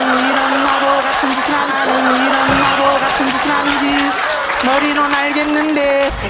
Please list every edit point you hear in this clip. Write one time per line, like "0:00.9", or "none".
0:01.7
0:03.6